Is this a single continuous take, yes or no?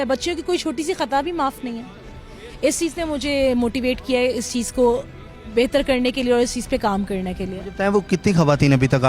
yes